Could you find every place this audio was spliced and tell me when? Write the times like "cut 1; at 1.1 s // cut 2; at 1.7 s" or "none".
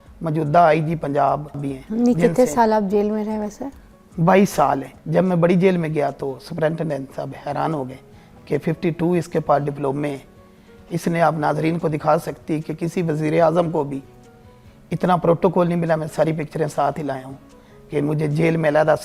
cut 1; at 1.7 s // cut 2; at 4.9 s

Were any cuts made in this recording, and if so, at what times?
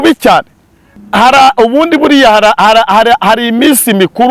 cut 1; at 0.9 s

